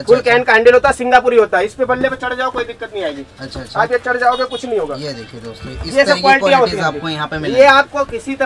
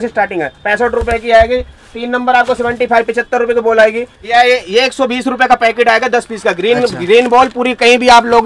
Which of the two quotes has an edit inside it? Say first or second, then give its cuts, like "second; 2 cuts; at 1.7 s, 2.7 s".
second; 1 cut; at 4.2 s